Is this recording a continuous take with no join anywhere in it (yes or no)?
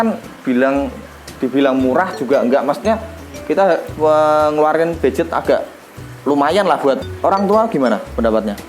no